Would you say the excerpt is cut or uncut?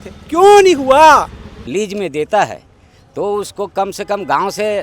cut